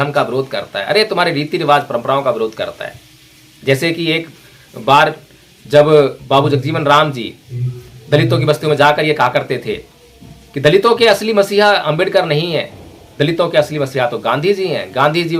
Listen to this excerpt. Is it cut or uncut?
uncut